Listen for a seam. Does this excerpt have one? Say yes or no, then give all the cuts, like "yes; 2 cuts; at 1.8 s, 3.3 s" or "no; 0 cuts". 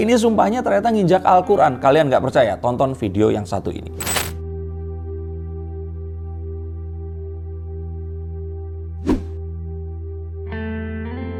no; 0 cuts